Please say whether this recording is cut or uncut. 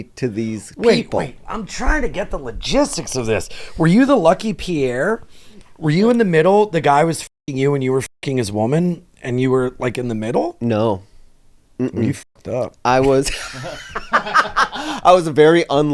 uncut